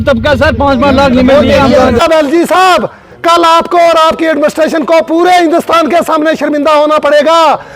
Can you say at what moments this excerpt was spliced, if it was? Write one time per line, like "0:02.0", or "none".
0:02.0